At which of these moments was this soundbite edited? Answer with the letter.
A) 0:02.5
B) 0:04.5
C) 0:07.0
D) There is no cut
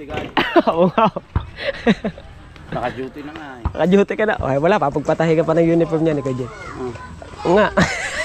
D